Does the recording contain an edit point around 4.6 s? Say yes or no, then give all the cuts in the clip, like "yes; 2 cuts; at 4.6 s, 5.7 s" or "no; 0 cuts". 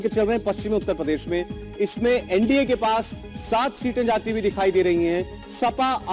yes; 1 cut; at 4.6 s